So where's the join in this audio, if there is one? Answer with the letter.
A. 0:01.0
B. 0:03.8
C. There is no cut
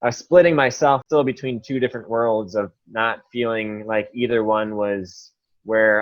A